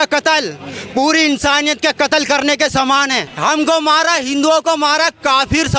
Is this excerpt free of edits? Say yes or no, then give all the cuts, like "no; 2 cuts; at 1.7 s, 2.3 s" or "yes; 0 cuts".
no; 1 cut; at 3.2 s